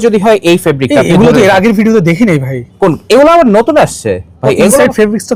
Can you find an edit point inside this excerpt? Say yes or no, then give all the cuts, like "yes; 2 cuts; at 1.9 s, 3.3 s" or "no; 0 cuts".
no; 0 cuts